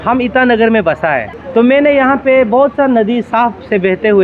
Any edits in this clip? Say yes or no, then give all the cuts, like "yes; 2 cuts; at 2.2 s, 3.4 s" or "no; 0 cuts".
yes; 1 cut; at 1.3 s